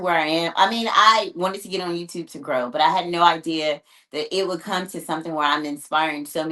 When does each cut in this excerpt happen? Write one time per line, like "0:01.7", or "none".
none